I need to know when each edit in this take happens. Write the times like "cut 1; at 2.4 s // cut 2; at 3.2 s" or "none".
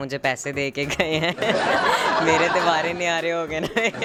none